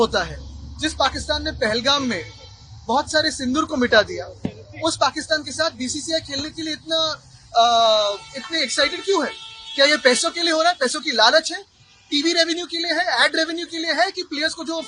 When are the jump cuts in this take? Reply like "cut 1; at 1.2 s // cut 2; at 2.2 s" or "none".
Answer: none

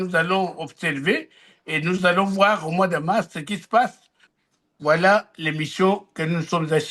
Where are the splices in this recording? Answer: cut 1; at 4.3 s

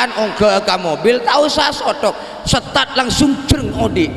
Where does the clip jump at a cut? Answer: none

